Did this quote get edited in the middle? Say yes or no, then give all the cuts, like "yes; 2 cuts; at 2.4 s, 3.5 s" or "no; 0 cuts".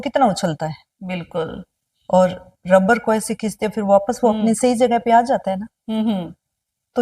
no; 0 cuts